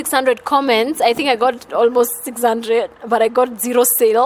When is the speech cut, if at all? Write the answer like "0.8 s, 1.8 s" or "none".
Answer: none